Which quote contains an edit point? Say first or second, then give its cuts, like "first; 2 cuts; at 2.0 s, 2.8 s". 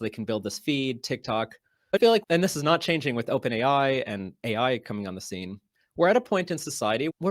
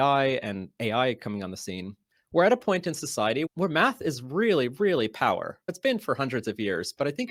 first; 1 cut; at 2.2 s